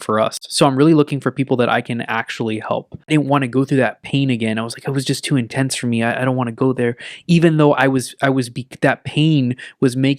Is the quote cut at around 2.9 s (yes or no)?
yes